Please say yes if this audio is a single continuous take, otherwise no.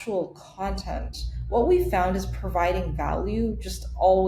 yes